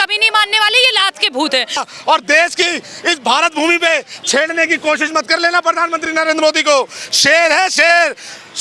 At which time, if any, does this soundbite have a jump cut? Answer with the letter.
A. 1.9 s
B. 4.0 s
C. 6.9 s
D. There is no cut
A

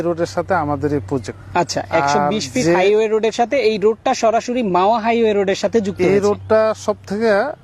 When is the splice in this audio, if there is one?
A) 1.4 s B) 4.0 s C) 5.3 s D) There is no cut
A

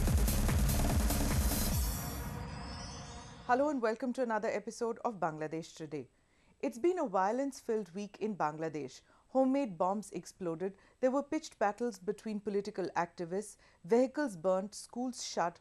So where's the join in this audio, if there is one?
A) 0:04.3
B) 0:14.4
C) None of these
A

